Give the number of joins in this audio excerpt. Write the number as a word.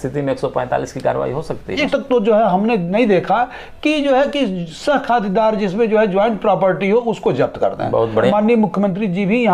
two